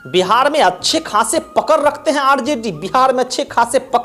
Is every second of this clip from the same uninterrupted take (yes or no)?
yes